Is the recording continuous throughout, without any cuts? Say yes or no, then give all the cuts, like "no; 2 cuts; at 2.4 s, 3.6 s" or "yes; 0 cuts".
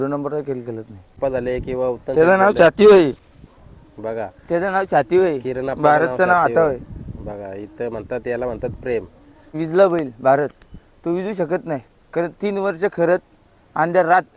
no; 2 cuts; at 1.2 s, 9.5 s